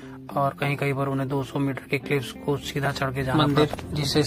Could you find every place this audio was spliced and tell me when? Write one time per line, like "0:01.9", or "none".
0:03.3